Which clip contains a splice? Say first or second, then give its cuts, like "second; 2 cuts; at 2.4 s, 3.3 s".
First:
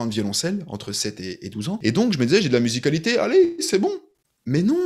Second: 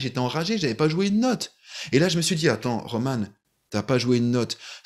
first; 1 cut; at 1.8 s